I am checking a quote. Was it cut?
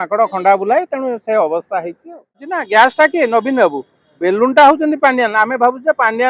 yes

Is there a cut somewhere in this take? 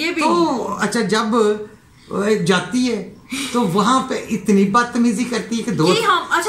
no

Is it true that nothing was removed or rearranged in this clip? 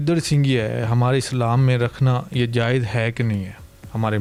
yes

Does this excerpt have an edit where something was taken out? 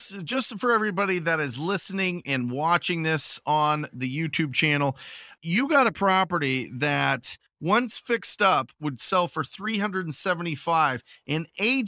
no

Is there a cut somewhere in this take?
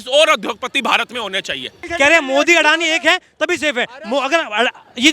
yes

